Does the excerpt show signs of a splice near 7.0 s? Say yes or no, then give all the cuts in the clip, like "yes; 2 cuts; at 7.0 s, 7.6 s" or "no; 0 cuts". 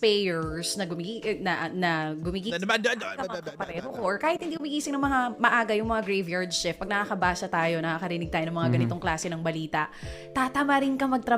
yes; 1 cut; at 7.0 s